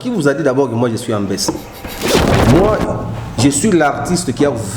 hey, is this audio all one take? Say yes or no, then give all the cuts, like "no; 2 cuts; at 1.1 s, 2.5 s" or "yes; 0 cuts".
no; 1 cut; at 2.1 s